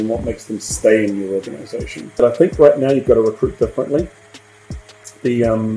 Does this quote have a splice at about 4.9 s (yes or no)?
no